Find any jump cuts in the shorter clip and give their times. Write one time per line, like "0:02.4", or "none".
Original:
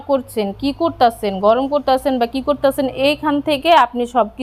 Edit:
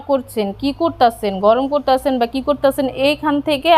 none